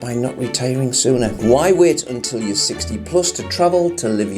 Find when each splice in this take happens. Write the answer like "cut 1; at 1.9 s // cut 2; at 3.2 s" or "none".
cut 1; at 1.3 s